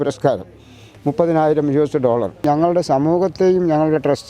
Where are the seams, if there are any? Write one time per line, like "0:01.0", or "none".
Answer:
0:02.4